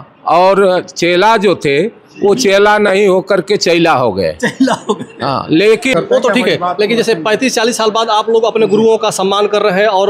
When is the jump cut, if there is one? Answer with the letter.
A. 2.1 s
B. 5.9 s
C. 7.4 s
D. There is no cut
B